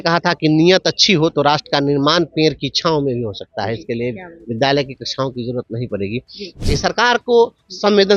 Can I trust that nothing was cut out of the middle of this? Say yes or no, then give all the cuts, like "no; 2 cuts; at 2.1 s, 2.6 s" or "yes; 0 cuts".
no; 1 cut; at 6.6 s